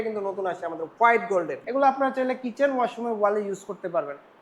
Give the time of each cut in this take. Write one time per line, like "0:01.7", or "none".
0:01.6